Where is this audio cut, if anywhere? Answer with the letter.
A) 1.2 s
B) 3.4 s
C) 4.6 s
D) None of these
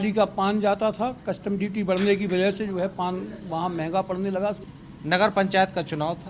C